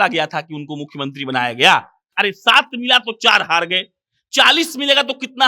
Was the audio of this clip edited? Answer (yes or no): yes